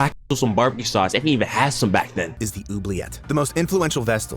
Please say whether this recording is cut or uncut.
cut